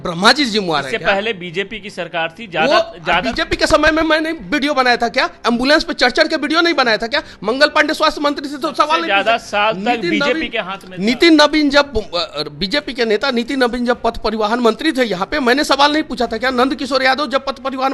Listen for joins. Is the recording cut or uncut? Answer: uncut